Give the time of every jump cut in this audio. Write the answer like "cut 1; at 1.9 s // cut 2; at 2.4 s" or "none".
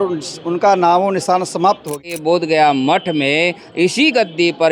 cut 1; at 1.9 s